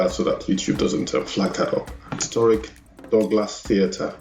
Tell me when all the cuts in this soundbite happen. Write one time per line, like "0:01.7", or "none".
0:02.3